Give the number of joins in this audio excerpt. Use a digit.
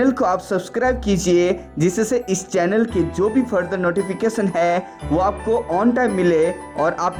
0